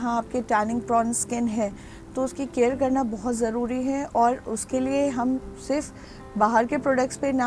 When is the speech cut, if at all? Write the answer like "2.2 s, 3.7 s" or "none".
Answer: none